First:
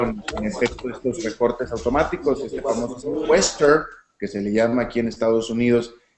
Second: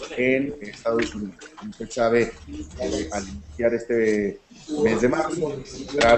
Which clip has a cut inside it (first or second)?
second